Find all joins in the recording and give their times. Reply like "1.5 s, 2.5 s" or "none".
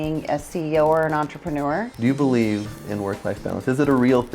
1.9 s

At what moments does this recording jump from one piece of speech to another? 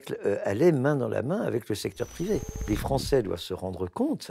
2.7 s

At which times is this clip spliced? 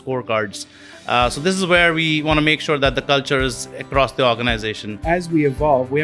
5.0 s

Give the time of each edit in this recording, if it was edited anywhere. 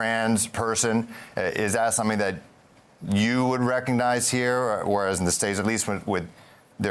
none

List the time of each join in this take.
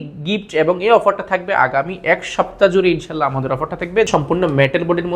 4.1 s

